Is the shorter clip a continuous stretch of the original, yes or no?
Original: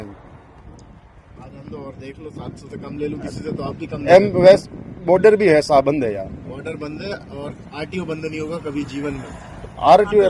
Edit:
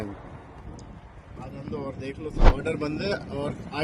no